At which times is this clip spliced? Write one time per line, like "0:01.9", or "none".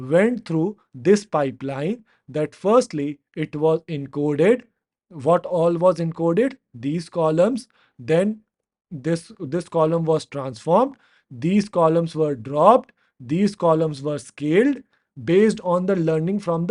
none